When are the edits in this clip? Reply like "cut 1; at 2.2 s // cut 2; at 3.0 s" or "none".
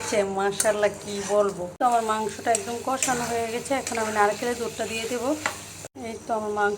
cut 1; at 1.7 s // cut 2; at 5.7 s